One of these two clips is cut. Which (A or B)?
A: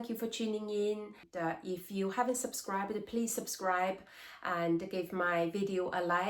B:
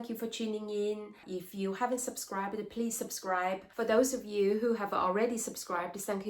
B